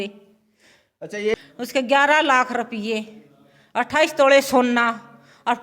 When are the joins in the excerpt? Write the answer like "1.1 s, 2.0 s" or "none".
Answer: 1.3 s